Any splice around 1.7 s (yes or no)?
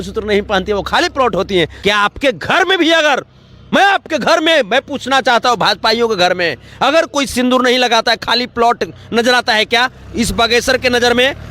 yes